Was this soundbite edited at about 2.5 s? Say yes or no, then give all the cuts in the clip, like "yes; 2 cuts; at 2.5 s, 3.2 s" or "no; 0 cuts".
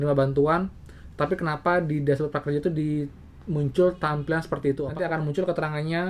no; 1 cut; at 4.9 s